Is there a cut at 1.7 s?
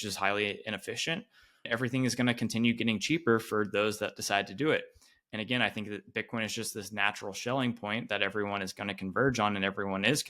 yes; 1 cut; at 1.7 s

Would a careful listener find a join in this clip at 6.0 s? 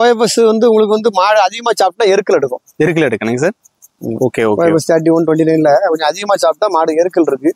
no; 0 cuts

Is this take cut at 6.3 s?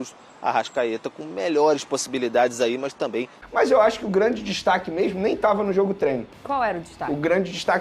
no; 1 cut; at 3.4 s

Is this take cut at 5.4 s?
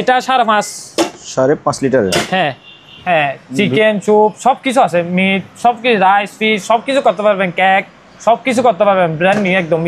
no; 1 cut; at 2.9 s

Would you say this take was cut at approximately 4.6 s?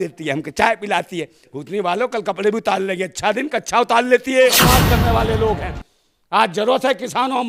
yes; 1 cut; at 4.6 s

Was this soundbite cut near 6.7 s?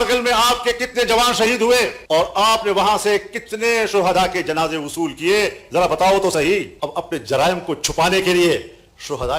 yes; 1 cut; at 6.7 s

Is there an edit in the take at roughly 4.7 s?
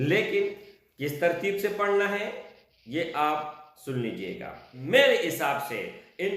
yes; 1 cut; at 4.7 s

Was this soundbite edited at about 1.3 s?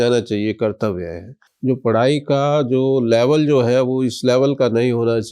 yes; 1 cut; at 1.3 s

